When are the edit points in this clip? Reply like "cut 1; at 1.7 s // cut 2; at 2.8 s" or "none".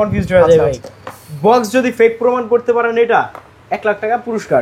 cut 1; at 0.9 s